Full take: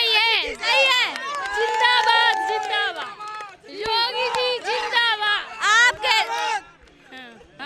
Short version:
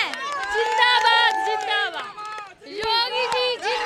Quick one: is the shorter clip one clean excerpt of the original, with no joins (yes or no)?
yes